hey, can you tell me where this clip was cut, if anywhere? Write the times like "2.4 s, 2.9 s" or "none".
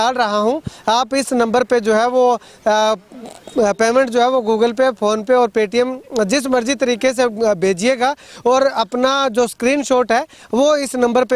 none